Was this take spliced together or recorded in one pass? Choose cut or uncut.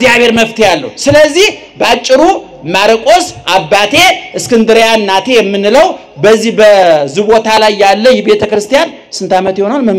uncut